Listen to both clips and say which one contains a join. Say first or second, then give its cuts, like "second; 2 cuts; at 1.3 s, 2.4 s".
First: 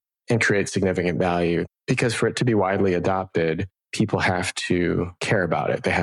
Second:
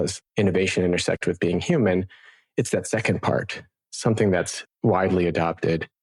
first; 3 cuts; at 1.7 s, 3.8 s, 5.2 s